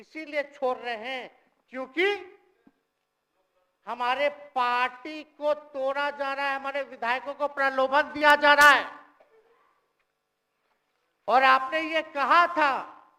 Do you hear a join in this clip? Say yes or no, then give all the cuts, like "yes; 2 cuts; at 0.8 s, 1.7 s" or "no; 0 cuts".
no; 0 cuts